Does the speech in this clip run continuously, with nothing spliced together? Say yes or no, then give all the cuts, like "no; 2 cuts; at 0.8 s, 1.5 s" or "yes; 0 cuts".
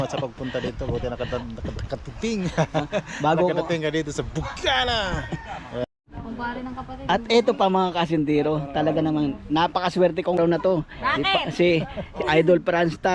no; 2 cuts; at 5.8 s, 10.4 s